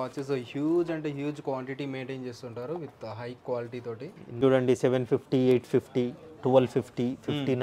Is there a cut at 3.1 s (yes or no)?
no